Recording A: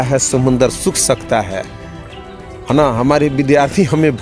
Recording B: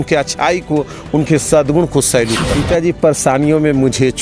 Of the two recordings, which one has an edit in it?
B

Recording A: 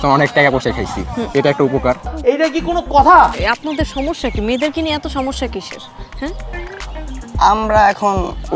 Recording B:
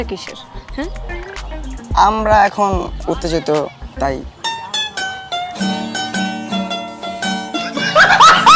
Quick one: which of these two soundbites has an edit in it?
A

